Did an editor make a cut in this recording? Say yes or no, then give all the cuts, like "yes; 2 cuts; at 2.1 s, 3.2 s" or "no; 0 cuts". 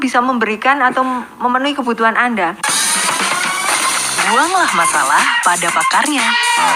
yes; 1 cut; at 2.7 s